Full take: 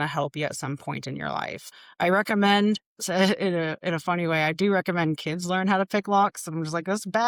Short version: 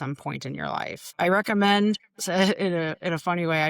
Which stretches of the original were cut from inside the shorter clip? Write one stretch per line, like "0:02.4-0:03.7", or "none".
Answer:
0:01.6-0:01.8